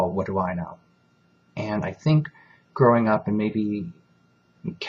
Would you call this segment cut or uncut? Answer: cut